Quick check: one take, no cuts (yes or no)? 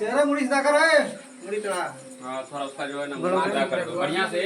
yes